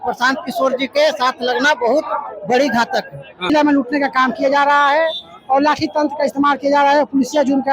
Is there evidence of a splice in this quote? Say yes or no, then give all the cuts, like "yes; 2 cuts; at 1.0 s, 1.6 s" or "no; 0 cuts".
yes; 1 cut; at 3.5 s